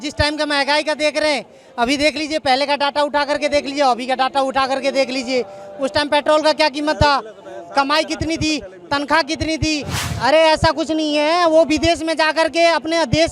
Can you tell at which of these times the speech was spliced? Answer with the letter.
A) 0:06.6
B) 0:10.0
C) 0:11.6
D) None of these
B